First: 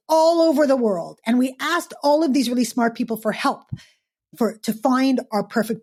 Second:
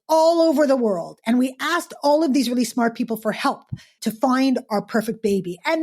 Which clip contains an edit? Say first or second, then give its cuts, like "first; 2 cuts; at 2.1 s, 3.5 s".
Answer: second; 1 cut; at 4.0 s